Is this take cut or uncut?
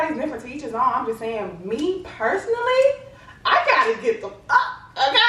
uncut